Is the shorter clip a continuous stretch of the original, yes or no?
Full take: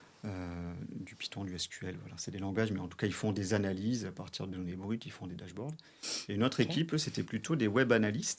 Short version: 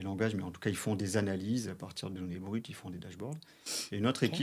yes